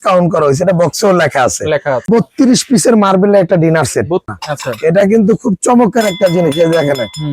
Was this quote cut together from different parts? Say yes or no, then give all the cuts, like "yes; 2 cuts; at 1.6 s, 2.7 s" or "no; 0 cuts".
yes; 2 cuts; at 2.1 s, 4.3 s